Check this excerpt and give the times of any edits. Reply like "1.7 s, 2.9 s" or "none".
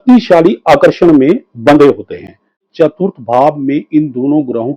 2.7 s